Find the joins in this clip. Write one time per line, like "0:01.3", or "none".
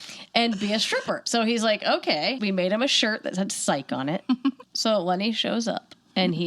0:01.2
0:02.4
0:04.6